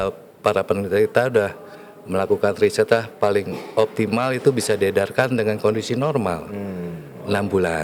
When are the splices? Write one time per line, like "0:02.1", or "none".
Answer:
none